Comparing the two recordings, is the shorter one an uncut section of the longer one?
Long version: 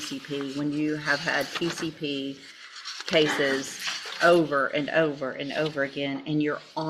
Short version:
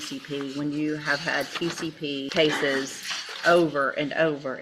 no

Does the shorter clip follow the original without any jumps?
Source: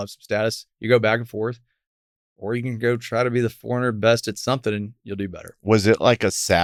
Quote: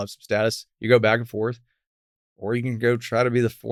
yes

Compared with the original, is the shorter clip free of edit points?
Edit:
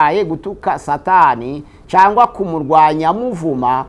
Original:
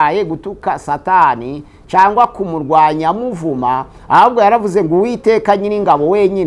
yes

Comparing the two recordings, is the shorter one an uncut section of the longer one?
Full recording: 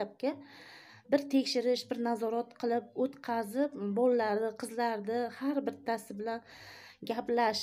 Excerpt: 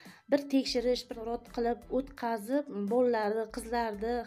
no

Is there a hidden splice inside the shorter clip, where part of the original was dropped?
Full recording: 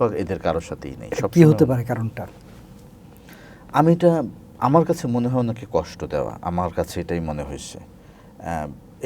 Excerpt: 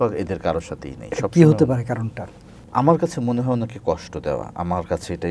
yes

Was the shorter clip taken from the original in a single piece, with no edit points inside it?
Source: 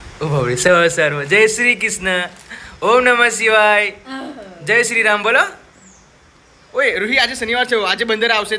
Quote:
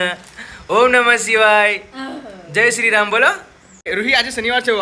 no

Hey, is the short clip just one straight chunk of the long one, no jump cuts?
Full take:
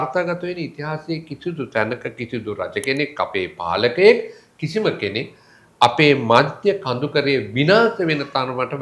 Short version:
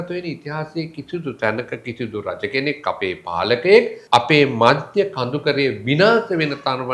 no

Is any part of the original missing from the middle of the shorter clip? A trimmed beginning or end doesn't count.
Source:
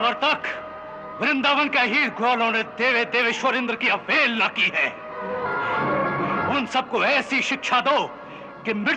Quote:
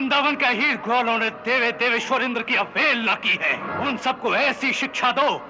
yes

